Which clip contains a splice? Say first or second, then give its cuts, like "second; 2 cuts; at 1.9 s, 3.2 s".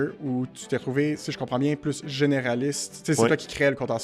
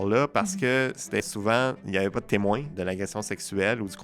second; 2 cuts; at 1.2 s, 2.7 s